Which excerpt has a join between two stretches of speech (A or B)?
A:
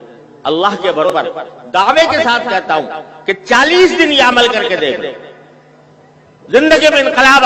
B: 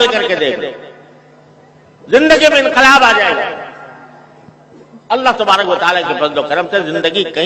A